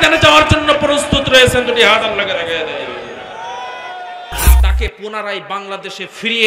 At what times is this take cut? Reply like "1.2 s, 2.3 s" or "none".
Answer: 4.6 s